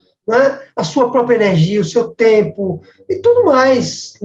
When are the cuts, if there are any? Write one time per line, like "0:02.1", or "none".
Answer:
none